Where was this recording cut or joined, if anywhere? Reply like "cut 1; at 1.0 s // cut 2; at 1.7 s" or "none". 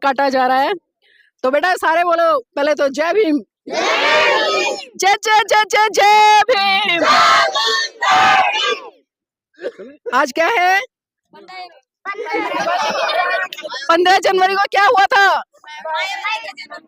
none